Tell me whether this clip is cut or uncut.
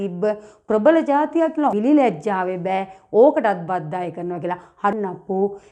cut